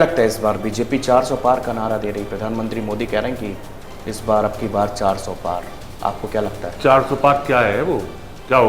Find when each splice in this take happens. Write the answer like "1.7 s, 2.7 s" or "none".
none